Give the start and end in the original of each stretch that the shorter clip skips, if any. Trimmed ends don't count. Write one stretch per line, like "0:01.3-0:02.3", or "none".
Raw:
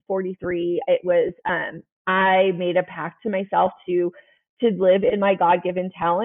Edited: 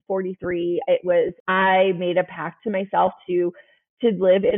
0:01.4-0:02.0